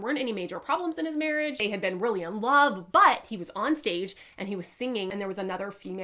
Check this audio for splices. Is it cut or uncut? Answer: cut